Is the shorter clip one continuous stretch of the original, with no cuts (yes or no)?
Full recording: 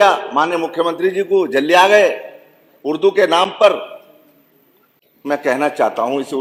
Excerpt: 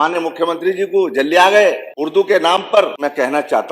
no